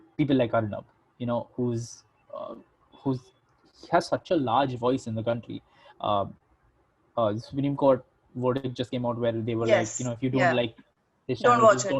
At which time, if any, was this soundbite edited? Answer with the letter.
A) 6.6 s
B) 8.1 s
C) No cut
C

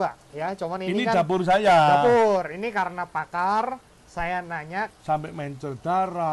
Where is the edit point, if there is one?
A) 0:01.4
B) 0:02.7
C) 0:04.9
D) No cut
C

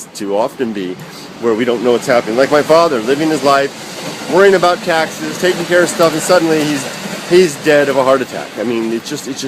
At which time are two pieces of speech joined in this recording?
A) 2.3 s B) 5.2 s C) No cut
A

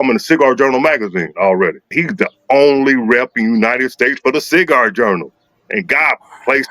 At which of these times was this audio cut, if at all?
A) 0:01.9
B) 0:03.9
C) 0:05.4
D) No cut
A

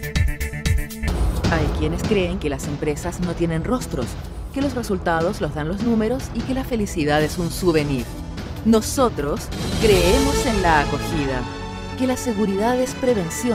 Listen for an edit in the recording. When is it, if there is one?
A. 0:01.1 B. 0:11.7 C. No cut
A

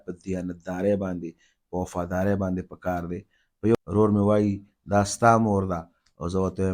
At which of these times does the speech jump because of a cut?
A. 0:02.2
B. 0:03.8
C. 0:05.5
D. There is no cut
B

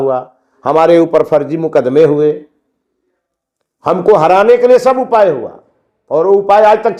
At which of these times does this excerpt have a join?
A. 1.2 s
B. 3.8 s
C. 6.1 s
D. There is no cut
D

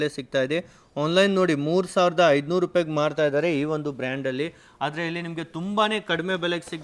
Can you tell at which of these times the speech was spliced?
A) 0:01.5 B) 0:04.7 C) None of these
C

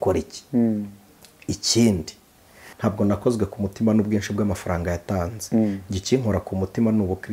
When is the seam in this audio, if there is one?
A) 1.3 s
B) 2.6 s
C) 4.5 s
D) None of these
B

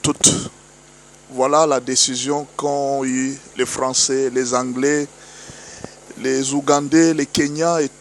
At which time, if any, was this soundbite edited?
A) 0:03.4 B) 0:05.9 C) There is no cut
C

